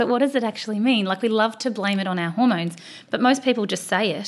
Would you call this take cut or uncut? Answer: uncut